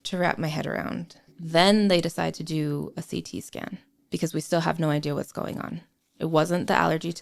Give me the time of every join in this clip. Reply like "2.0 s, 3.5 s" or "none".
1.3 s, 3.9 s